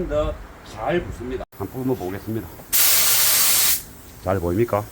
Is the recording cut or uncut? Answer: cut